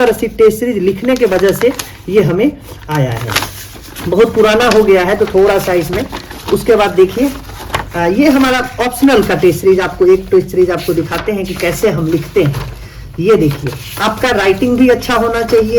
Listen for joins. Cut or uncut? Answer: uncut